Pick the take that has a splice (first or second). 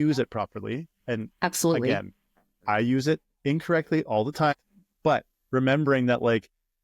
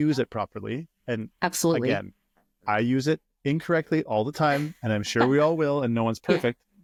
first